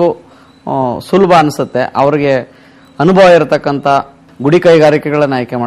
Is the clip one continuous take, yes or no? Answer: no